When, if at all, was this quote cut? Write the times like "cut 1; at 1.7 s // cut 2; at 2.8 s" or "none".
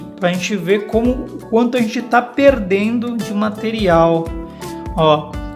none